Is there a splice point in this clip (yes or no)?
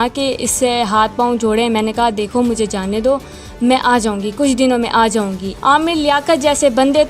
yes